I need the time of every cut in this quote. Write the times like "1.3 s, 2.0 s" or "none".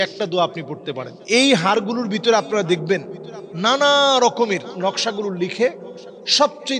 1.2 s, 4.7 s